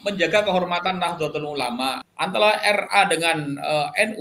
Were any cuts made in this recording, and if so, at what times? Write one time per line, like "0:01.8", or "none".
0:02.1